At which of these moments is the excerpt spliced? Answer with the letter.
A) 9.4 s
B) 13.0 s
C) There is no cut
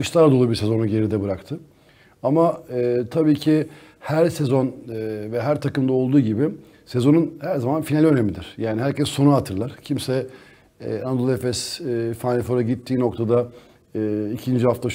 C